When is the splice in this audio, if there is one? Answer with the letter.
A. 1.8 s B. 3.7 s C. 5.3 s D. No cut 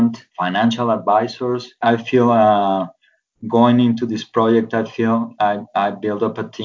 A